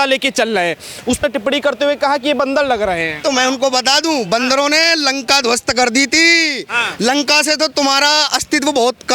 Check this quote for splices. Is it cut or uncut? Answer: uncut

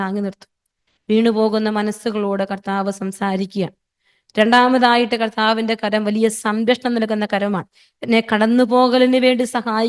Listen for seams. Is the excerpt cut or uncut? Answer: uncut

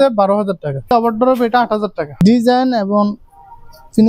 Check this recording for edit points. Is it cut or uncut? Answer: cut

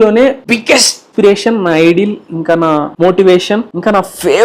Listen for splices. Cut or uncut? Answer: cut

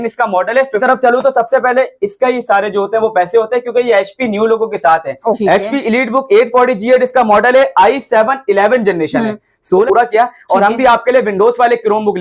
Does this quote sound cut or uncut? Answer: cut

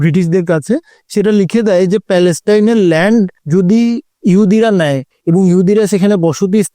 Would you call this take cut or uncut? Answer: cut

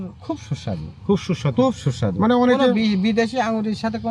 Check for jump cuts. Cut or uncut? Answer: uncut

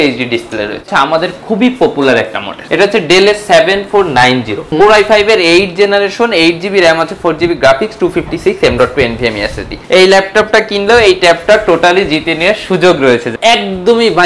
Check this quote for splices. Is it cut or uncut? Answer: cut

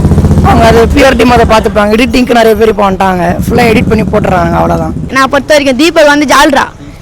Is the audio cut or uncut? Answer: cut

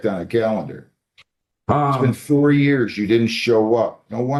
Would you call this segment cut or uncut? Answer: uncut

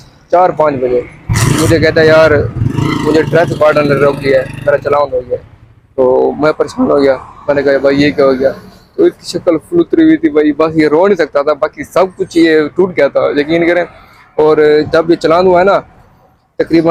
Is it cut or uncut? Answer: uncut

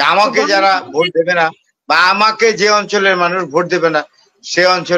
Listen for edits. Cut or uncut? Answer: uncut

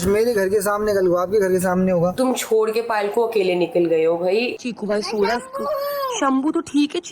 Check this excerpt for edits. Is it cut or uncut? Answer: cut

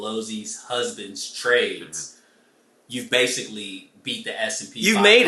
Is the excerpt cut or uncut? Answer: uncut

